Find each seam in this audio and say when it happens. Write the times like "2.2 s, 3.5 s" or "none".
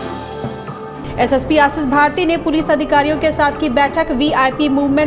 1.0 s